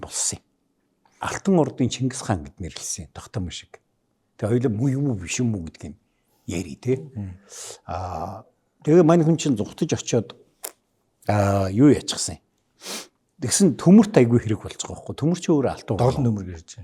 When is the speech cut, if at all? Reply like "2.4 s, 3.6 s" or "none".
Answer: 1.2 s